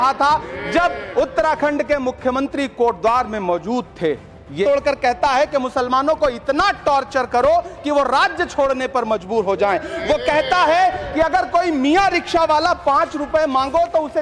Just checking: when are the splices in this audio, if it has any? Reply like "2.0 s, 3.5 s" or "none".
4.7 s